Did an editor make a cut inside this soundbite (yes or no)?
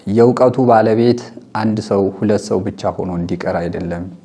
no